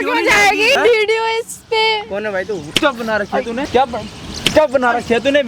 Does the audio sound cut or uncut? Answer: cut